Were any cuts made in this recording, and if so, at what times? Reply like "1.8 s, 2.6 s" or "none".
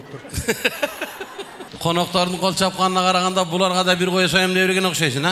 1.6 s